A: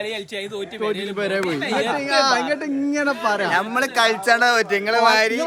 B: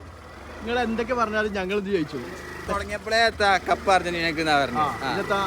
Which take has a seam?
B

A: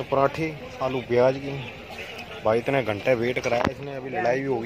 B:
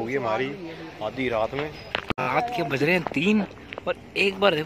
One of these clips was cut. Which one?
B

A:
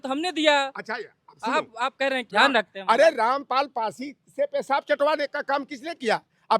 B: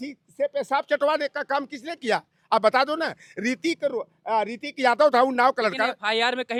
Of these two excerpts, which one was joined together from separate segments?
A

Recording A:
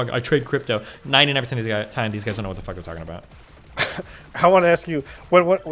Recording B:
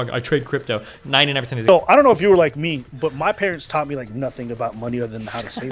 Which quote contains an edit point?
B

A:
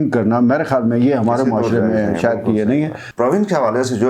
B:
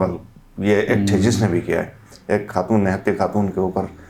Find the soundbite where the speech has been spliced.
A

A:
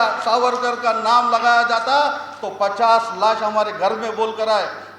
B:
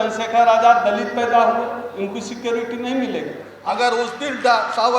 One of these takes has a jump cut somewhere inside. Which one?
B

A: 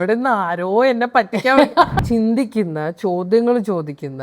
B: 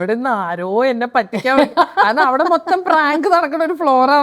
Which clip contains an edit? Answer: A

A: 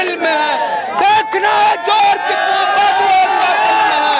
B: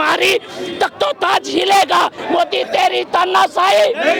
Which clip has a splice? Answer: B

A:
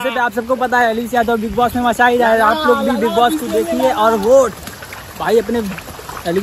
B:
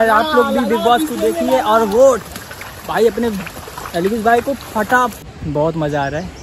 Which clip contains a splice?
B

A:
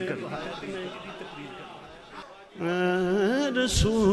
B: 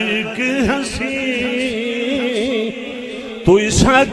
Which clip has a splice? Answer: A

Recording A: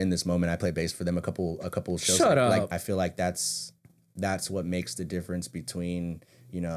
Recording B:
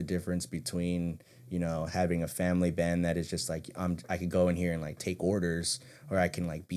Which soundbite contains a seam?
A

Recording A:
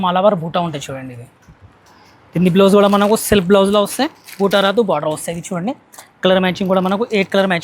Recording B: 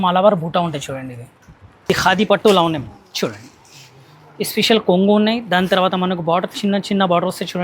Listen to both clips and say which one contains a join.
B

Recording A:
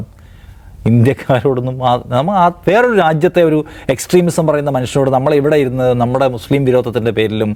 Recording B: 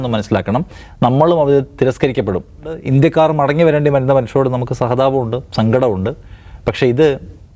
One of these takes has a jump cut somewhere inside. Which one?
B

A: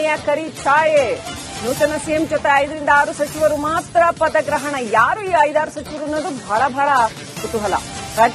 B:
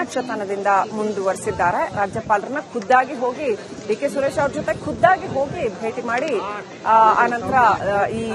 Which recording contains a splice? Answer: A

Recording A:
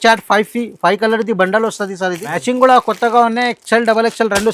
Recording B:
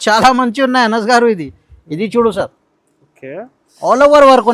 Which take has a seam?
A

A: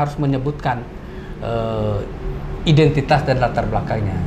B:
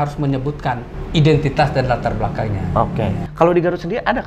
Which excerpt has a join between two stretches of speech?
B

